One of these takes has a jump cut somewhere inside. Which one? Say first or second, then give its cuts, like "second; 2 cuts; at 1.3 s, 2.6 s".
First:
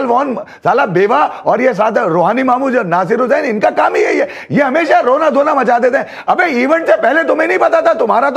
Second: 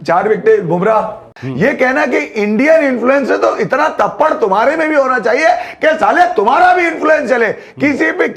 second; 1 cut; at 1.4 s